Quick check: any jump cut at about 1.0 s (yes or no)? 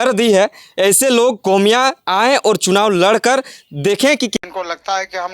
no